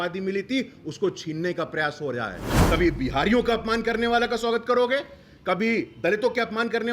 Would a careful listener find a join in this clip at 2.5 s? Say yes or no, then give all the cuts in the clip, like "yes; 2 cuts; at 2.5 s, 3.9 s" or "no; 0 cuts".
yes; 1 cut; at 2.5 s